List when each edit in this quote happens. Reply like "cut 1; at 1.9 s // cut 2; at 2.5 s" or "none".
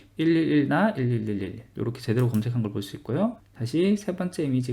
cut 1; at 3.5 s